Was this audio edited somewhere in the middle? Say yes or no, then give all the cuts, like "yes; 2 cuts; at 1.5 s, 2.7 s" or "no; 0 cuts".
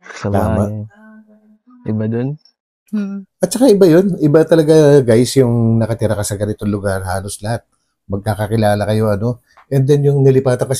no; 0 cuts